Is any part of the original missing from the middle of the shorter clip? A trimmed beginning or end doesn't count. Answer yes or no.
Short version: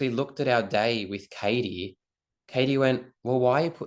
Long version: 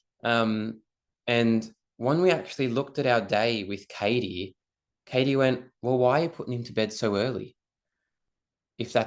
no